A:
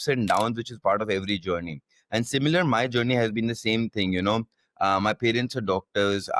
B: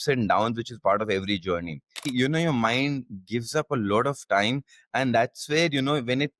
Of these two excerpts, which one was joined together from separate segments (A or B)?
B